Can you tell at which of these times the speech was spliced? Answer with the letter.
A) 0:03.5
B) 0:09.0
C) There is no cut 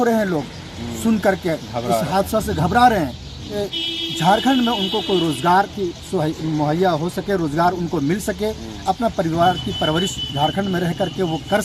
A